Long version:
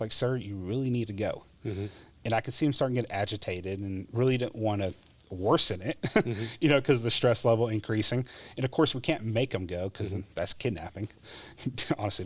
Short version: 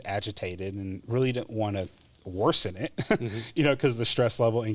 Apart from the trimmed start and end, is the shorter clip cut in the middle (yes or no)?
no